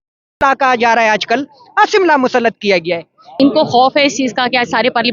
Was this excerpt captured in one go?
no; 1 cut; at 3.3 s

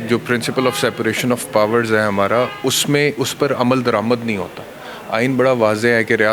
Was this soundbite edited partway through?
no; 0 cuts

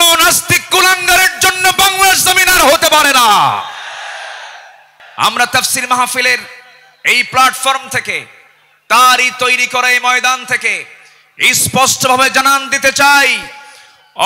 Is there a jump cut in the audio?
yes; 1 cut; at 5.0 s

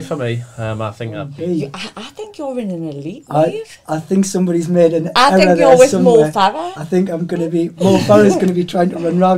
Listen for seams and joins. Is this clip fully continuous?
no; 1 cut; at 1.3 s

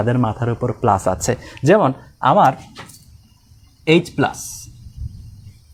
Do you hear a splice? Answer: no; 0 cuts

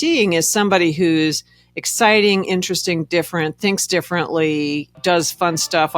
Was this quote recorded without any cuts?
no; 1 cut; at 4.9 s

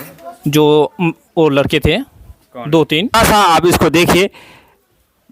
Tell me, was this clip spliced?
yes; 1 cut; at 3.2 s

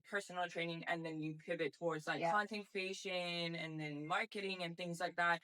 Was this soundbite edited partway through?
no; 0 cuts

